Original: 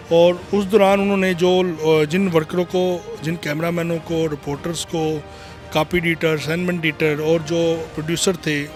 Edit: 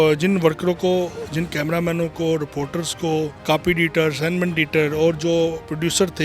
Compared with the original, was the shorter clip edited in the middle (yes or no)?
yes